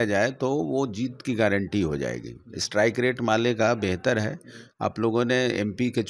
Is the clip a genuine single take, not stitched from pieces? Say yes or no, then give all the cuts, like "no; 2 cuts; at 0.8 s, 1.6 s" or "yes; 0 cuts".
yes; 0 cuts